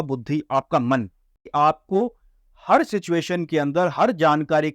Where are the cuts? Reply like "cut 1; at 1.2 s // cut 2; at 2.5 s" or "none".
cut 1; at 1.4 s